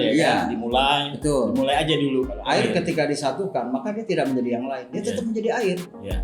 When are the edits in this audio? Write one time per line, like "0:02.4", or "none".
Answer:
0:02.4